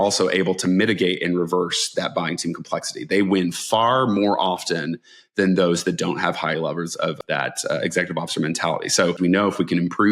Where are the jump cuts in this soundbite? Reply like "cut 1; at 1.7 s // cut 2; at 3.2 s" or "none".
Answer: cut 1; at 7.2 s // cut 2; at 9.2 s

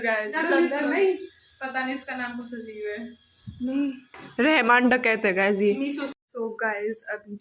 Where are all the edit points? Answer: cut 1; at 6.2 s

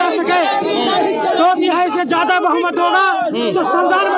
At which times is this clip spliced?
none

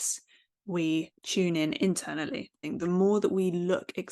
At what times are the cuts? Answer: cut 1; at 1.2 s // cut 2; at 2.6 s

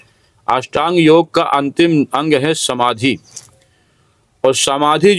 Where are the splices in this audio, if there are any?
none

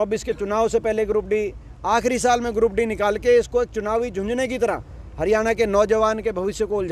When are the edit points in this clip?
none

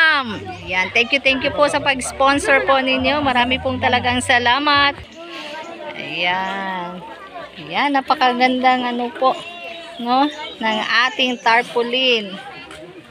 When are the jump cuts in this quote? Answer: none

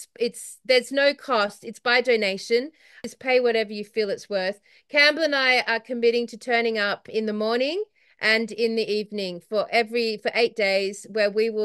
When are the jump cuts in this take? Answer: cut 1; at 3.0 s // cut 2; at 7.1 s

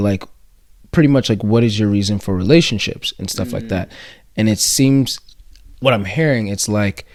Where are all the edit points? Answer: none

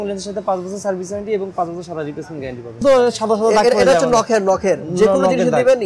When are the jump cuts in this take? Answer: cut 1; at 2.8 s

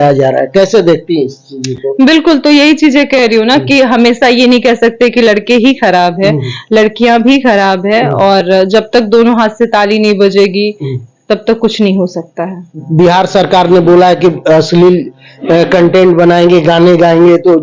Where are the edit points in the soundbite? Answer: none

